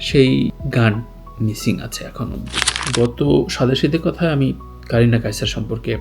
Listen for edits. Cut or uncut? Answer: cut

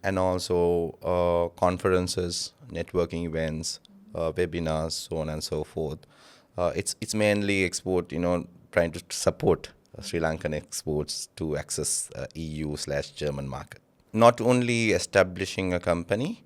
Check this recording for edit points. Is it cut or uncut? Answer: cut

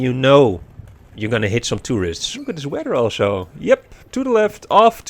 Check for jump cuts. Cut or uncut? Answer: cut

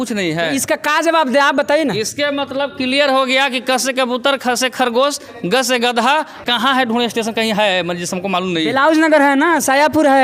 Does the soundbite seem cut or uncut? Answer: cut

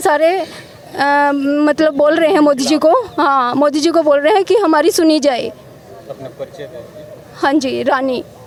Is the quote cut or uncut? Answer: uncut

